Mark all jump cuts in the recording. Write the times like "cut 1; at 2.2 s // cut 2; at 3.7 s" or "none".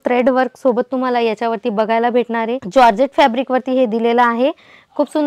cut 1; at 2.7 s